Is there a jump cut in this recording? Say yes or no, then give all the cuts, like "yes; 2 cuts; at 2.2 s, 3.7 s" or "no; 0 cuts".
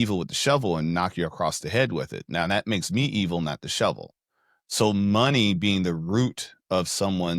no; 0 cuts